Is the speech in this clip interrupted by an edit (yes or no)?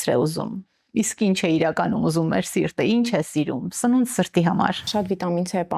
yes